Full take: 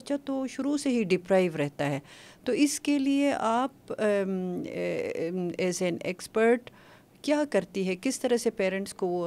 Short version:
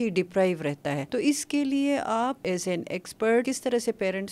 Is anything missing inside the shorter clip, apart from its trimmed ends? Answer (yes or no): yes